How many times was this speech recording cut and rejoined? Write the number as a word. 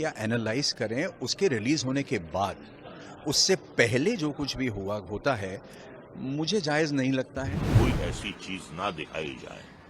one